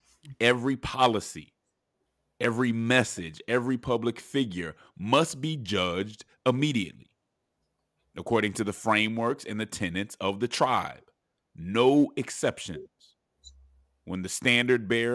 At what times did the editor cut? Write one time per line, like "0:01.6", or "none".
none